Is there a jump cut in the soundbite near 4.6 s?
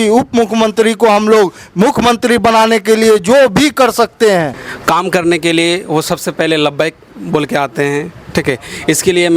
yes; 1 cut; at 4.6 s

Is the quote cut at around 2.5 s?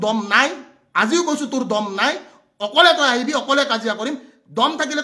no; 0 cuts

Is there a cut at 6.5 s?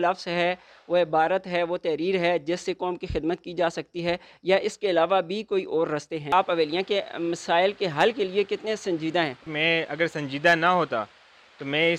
yes; 2 cuts; at 6.5 s, 9.5 s

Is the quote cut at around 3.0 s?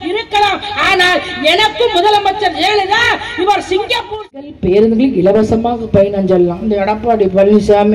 no; 1 cut; at 4.5 s

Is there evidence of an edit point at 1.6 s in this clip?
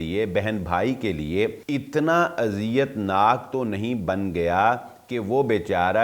yes; 1 cut; at 1.6 s

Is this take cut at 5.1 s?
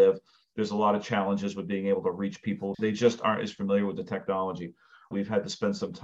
yes; 2 cuts; at 2.7 s, 5.1 s

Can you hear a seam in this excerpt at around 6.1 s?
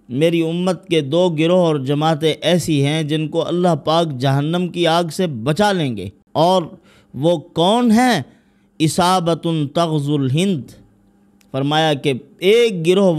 yes; 1 cut; at 6.1 s

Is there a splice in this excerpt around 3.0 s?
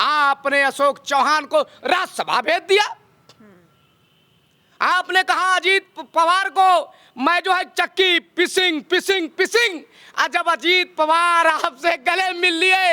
no; 0 cuts

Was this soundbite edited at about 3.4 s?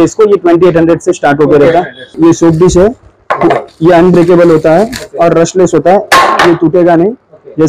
no; 1 cut; at 2.1 s

